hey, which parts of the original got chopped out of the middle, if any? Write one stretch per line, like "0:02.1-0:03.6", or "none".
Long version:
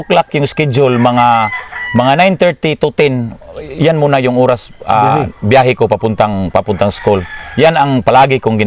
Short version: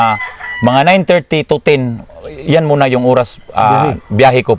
none